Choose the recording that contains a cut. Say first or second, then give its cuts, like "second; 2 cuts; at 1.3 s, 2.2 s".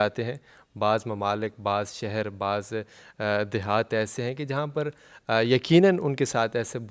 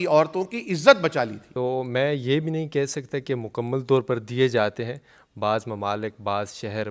second; 1 cut; at 1.4 s